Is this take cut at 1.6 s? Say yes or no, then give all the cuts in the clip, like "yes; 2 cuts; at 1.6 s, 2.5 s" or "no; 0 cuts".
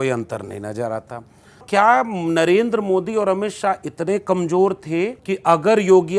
yes; 2 cuts; at 1.6 s, 5.2 s